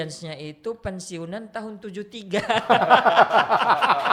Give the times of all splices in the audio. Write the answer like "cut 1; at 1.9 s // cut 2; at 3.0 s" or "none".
none